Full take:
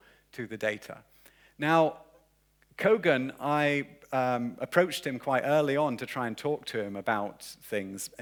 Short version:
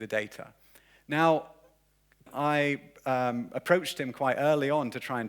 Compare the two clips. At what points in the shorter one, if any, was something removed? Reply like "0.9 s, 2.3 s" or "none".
2.2 s